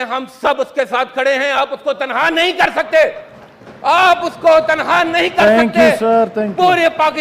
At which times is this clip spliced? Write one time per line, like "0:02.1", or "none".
none